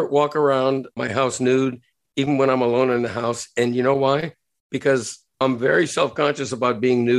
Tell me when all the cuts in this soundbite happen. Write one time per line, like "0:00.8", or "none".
0:01.0